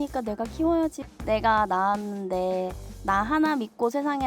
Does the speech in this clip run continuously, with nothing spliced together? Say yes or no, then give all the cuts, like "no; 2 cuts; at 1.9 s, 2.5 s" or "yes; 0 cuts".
no; 1 cut; at 1.0 s